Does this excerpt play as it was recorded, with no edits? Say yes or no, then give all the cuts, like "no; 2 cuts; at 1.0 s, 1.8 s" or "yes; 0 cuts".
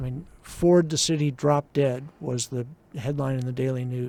yes; 0 cuts